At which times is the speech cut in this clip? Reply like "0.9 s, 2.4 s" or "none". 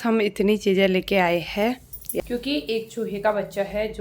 2.3 s